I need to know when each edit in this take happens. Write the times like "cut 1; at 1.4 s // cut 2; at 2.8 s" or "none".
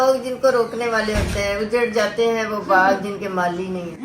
none

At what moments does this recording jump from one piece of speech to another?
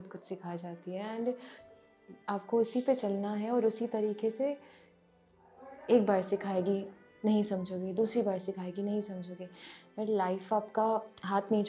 none

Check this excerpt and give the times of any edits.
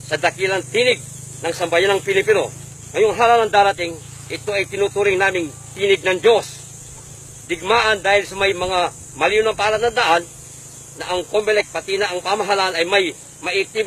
cut 1; at 4.3 s

